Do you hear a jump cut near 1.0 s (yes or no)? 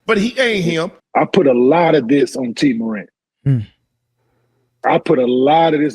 yes